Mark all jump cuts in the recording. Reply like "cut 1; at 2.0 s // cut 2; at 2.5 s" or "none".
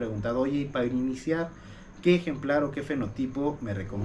none